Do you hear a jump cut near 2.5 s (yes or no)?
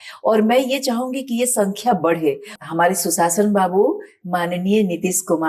yes